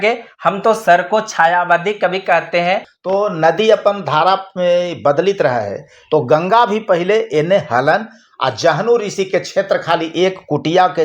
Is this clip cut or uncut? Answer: cut